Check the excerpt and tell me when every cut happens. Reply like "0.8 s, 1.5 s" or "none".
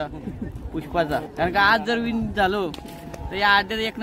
1.3 s